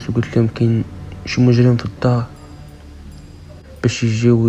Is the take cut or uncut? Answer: uncut